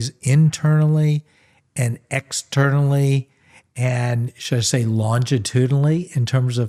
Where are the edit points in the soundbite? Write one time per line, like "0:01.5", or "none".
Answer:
none